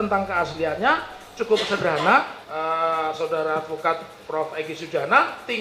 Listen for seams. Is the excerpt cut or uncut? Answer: cut